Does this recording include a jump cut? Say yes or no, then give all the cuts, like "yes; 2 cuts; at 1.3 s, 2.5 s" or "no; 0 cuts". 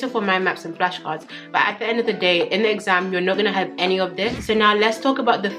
yes; 1 cut; at 4.4 s